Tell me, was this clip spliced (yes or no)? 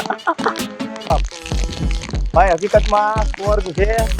yes